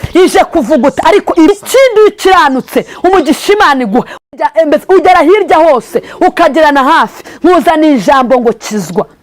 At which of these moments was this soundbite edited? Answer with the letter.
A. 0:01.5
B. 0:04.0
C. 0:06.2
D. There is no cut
A